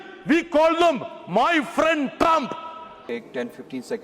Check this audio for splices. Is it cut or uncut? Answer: cut